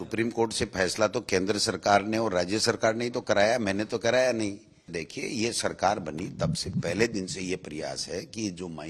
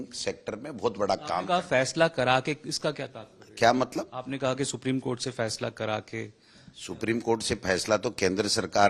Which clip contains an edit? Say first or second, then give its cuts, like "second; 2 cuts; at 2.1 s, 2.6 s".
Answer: first; 1 cut; at 4.9 s